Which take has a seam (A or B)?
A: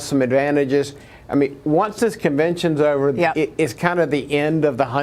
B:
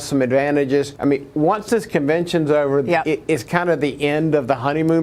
B